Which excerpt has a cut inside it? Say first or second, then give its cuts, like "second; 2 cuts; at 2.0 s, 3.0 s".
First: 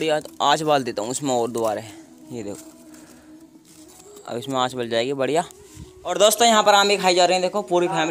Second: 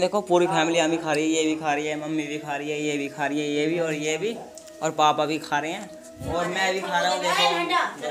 first; 1 cut; at 6.1 s